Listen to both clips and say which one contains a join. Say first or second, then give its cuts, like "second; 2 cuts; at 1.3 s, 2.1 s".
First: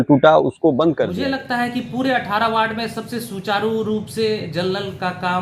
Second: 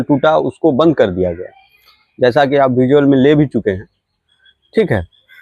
first; 1 cut; at 1.1 s